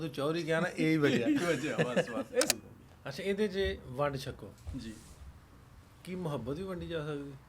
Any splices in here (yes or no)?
yes